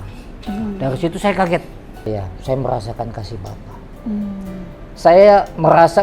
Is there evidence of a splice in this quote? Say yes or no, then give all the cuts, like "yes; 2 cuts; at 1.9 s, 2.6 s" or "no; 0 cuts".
yes; 1 cut; at 2.1 s